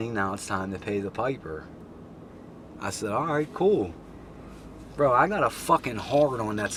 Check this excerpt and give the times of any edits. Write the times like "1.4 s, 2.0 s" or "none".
none